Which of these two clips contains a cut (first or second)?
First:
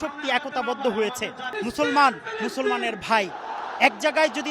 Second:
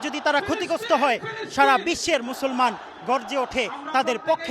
first